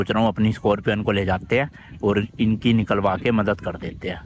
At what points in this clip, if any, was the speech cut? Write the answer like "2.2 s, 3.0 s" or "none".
none